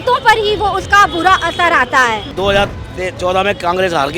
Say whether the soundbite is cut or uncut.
cut